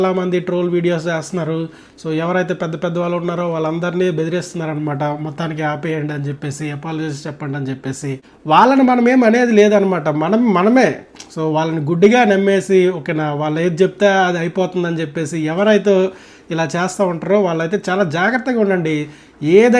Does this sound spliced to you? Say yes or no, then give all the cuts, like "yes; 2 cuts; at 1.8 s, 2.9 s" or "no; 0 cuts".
no; 0 cuts